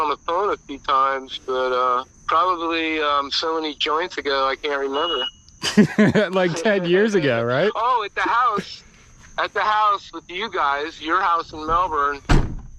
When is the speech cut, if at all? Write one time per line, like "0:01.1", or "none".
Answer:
0:02.1